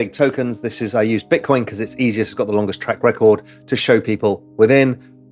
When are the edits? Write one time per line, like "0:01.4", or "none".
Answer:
none